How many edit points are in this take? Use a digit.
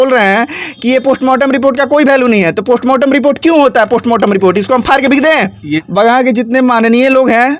1